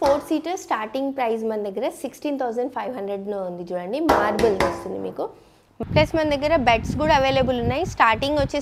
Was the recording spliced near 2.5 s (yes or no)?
no